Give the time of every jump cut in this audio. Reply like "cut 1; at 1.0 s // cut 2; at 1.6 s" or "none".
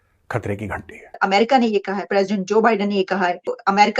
cut 1; at 1.2 s